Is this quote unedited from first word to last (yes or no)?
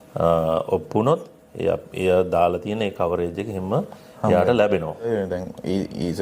no